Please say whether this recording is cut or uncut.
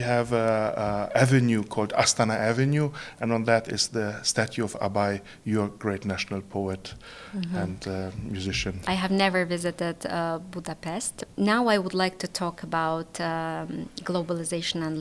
uncut